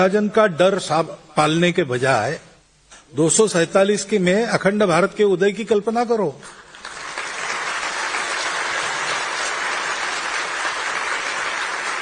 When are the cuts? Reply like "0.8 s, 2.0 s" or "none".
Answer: 8.9 s